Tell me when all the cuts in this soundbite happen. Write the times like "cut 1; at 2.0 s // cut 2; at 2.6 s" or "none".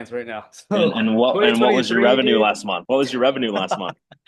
cut 1; at 2.7 s